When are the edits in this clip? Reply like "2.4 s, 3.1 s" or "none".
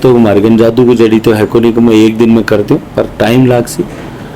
none